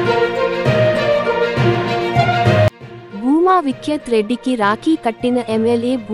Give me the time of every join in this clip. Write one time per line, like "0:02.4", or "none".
0:02.7